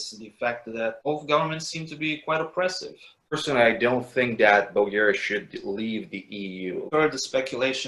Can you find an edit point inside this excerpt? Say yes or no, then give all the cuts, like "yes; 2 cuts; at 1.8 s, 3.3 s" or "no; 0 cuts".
yes; 2 cuts; at 3.3 s, 6.9 s